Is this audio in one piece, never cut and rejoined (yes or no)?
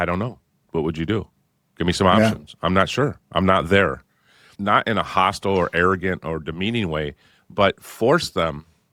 yes